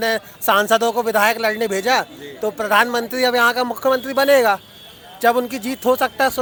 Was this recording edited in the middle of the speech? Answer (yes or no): no